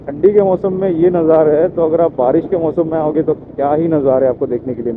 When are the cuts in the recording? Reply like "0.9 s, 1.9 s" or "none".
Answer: none